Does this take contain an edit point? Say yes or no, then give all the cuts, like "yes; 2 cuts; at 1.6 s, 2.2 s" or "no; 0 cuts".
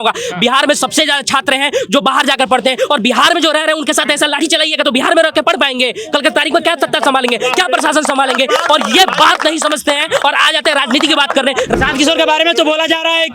yes; 1 cut; at 11.7 s